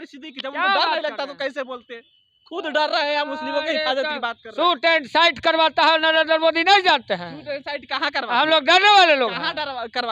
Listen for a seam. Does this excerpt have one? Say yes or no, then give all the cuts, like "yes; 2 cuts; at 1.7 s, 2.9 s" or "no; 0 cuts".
no; 0 cuts